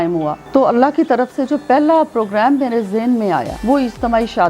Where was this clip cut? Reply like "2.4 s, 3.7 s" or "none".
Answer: 3.5 s